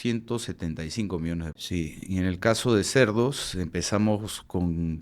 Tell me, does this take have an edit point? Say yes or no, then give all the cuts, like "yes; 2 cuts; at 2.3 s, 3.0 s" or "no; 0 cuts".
yes; 1 cut; at 1.6 s